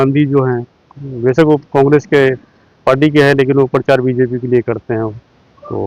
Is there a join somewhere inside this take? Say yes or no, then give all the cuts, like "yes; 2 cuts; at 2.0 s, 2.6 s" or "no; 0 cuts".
no; 0 cuts